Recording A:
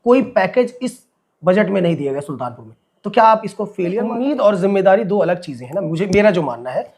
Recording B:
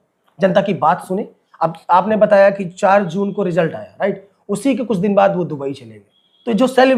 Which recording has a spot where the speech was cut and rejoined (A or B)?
A